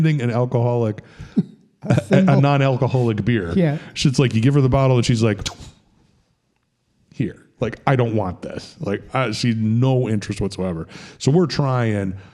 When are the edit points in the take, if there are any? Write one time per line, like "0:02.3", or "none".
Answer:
none